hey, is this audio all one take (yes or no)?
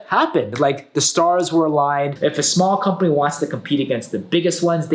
no